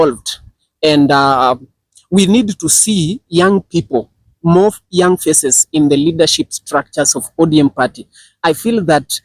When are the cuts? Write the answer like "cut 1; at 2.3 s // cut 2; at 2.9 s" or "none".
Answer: none